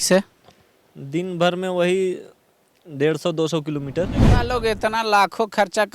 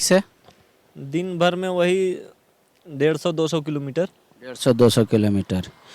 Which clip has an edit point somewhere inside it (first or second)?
first